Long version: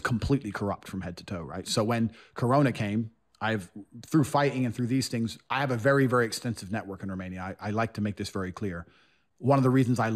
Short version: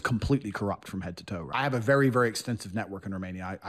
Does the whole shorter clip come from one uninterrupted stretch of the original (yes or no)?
no